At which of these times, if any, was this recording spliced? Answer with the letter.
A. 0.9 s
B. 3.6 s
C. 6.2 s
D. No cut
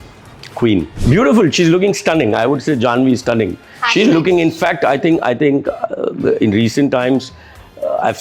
A